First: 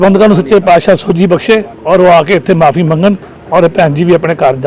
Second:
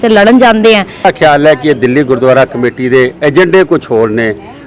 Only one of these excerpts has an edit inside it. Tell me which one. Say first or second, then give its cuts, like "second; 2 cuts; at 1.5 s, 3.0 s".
second; 1 cut; at 1.0 s